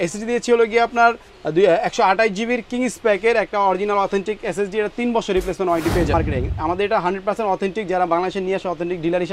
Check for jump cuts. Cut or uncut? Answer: cut